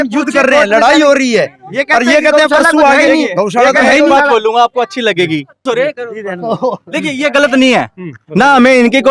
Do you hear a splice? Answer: yes; 1 cut; at 5.6 s

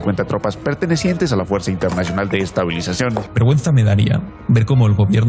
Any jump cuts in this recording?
yes; 1 cut; at 3.3 s

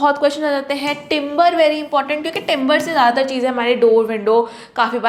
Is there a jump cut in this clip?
no; 0 cuts

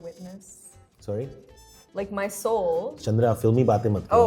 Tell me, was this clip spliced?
no; 0 cuts

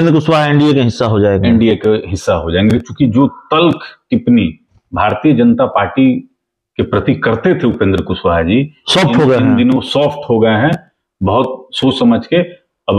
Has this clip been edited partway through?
no; 0 cuts

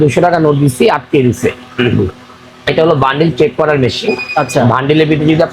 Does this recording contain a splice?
no; 0 cuts

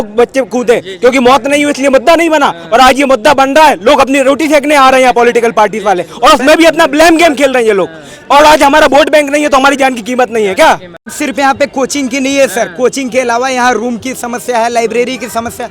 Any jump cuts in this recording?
yes; 1 cut; at 11.1 s

